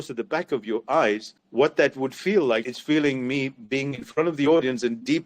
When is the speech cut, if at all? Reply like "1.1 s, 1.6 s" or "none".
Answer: 1.4 s, 2.7 s